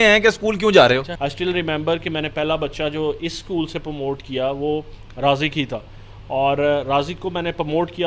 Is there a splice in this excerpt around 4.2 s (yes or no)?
no